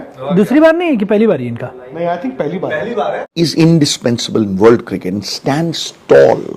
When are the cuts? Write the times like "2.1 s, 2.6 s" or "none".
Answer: 3.3 s